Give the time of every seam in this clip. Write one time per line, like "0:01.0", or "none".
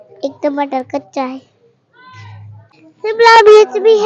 0:02.6